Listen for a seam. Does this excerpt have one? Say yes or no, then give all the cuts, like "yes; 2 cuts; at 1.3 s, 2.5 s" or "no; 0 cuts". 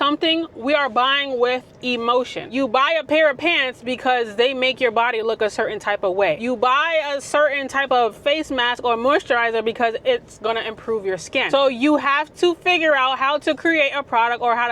yes; 3 cuts; at 2.5 s, 6.4 s, 11.4 s